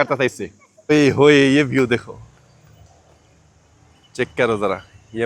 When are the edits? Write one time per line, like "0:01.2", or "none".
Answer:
0:00.9